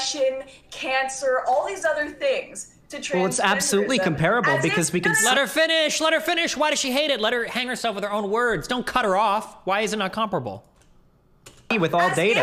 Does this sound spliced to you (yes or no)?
no